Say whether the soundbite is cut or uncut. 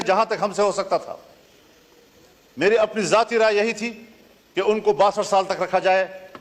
uncut